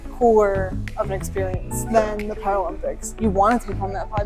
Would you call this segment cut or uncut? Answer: cut